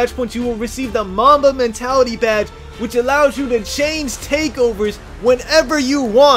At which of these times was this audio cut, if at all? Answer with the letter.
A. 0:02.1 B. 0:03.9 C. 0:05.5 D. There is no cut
D